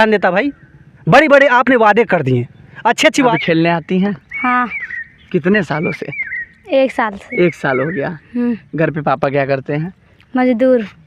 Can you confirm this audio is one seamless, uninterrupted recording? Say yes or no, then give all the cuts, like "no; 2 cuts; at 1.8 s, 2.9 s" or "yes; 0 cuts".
no; 1 cut; at 3.3 s